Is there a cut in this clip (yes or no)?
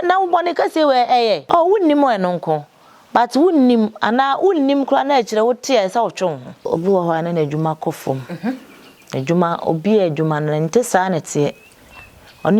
yes